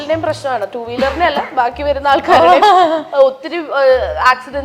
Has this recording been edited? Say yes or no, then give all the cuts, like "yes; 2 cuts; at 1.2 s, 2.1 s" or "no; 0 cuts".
no; 0 cuts